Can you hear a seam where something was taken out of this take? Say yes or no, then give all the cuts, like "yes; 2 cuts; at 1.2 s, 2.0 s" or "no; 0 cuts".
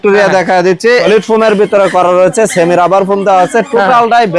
yes; 1 cut; at 1.0 s